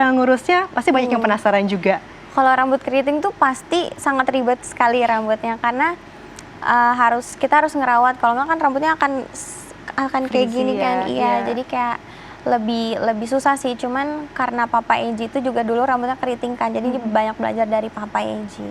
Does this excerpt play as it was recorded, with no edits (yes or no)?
yes